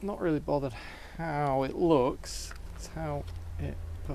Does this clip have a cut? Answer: no; 0 cuts

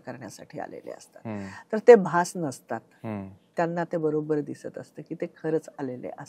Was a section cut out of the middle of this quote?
no; 0 cuts

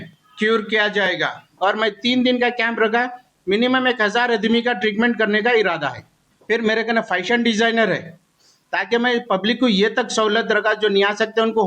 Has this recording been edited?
yes; 2 cuts; at 1.4 s, 6.3 s

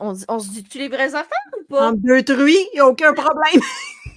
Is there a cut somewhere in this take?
no; 0 cuts

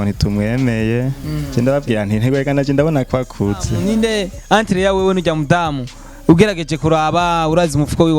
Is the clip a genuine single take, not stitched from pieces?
no; 2 cuts; at 1.3 s, 3.7 s

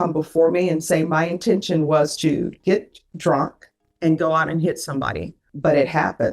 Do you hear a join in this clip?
yes; 1 cut; at 5.4 s

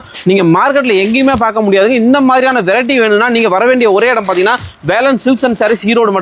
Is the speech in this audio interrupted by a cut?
no; 0 cuts

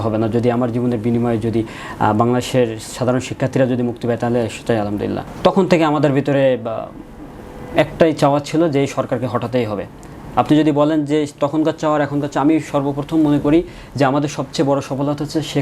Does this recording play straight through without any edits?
no; 1 cut; at 5.3 s

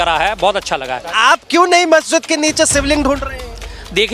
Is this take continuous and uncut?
no; 1 cut; at 1.1 s

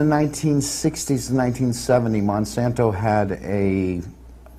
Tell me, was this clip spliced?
yes; 1 cut; at 2.6 s

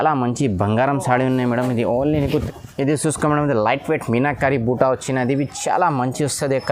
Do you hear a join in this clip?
yes; 1 cut; at 2.3 s

